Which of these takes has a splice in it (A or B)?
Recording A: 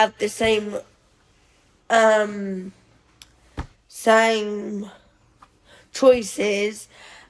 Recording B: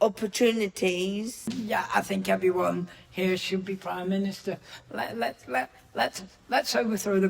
B